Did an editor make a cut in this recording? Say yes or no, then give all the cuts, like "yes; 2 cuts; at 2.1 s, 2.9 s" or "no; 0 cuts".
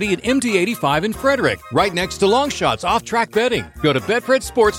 no; 0 cuts